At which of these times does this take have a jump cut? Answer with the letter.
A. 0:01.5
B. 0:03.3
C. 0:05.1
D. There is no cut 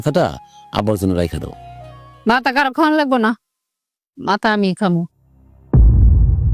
D